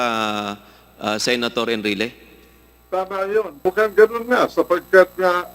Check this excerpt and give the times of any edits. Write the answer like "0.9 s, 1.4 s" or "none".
3.7 s